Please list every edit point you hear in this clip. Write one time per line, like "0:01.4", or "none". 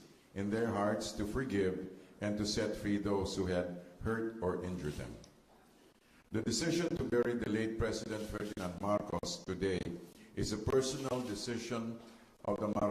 none